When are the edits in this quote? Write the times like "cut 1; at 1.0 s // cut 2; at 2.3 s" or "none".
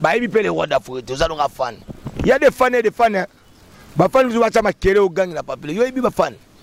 none